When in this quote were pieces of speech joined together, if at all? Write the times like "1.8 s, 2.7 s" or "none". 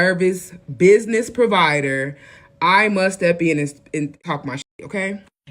4.2 s